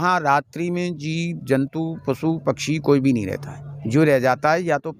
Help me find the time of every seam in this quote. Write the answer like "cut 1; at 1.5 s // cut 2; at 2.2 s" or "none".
none